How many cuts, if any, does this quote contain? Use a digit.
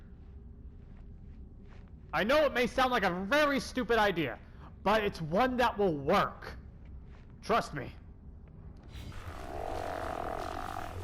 1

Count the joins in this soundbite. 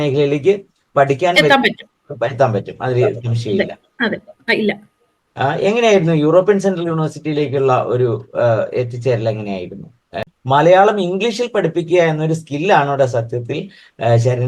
1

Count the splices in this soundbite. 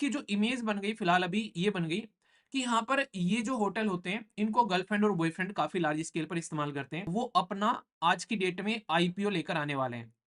1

